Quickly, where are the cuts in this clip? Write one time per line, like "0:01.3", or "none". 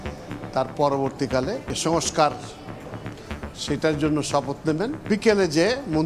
0:01.7
0:05.0